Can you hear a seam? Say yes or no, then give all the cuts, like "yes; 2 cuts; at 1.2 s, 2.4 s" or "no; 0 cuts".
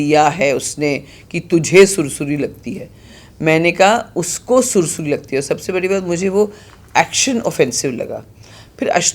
no; 0 cuts